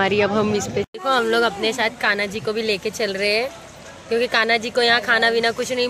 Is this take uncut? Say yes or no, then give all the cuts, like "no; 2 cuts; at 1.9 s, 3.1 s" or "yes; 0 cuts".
no; 1 cut; at 0.9 s